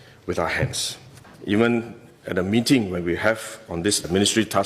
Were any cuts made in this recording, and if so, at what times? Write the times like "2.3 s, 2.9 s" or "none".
1.3 s